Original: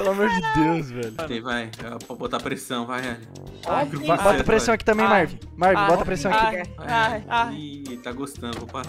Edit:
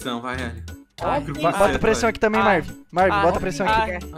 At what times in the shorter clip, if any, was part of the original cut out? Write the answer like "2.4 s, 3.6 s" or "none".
none